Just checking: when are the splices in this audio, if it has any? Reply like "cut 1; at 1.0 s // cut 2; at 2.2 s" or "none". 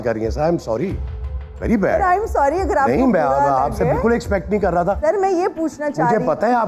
cut 1; at 5.0 s